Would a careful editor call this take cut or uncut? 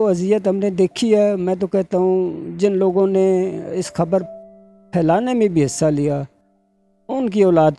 uncut